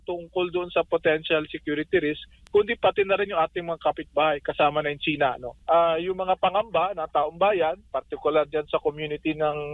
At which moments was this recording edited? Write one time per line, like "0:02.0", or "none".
0:05.5